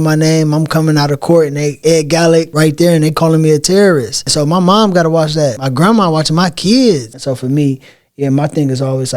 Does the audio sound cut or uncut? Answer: cut